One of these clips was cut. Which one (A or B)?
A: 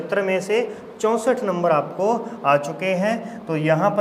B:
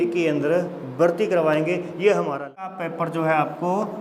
B